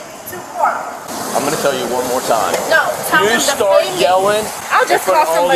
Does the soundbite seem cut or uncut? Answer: cut